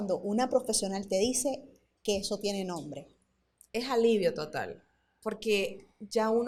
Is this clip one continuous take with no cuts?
yes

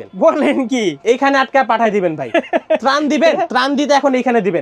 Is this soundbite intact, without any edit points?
no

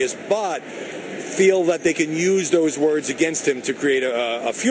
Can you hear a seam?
no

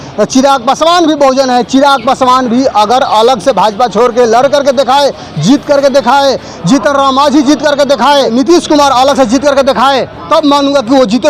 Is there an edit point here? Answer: yes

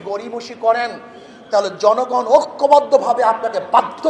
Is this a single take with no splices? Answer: yes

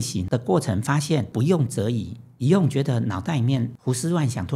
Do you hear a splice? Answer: yes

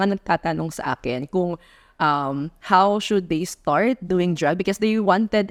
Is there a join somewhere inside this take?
no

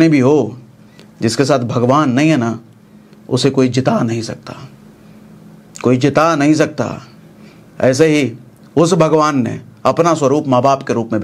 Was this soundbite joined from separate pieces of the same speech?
no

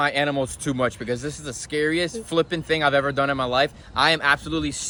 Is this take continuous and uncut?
yes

